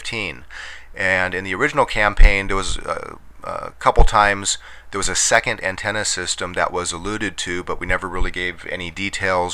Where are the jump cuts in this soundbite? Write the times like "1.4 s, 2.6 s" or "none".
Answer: 6.2 s

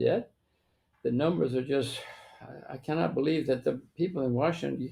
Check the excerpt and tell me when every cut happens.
none

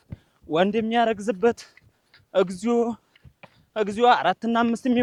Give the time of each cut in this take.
none

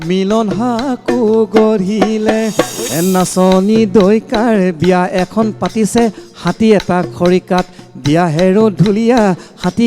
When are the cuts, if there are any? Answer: 2.9 s

